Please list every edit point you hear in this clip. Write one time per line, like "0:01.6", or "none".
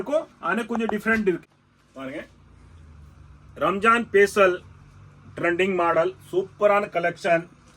0:01.4